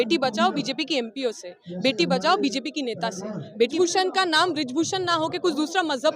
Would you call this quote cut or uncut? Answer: cut